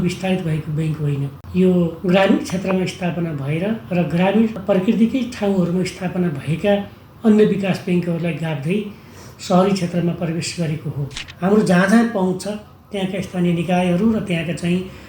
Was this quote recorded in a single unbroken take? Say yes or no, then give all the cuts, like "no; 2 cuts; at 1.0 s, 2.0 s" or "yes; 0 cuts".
no; 4 cuts; at 1.4 s, 2.0 s, 4.6 s, 11.2 s